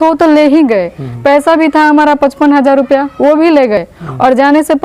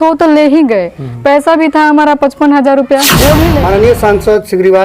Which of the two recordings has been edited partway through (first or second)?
second